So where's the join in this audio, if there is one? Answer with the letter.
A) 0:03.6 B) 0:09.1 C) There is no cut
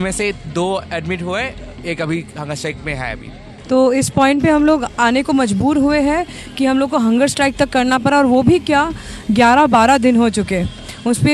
A